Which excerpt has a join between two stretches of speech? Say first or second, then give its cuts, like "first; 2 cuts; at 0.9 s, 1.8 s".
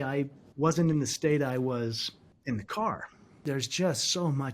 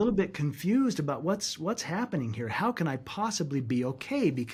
first; 1 cut; at 3.4 s